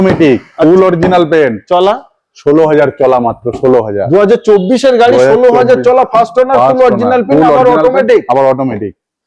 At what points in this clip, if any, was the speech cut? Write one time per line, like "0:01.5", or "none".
none